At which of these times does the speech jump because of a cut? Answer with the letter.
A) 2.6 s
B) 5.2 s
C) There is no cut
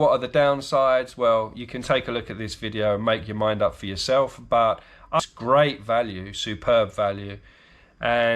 B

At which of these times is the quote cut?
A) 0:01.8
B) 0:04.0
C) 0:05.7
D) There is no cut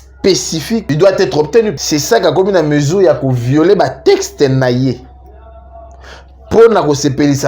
A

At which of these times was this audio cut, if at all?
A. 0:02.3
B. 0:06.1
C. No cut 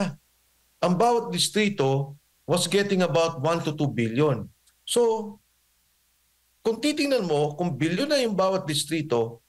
C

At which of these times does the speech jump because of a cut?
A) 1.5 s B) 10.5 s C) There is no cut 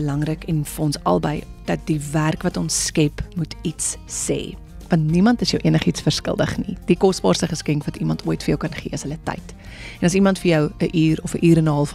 A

